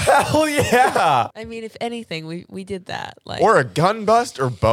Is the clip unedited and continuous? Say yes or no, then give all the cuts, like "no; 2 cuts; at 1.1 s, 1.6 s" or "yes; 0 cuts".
yes; 0 cuts